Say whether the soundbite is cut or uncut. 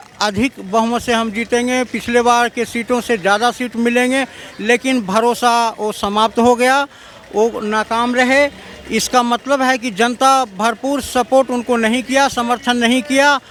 uncut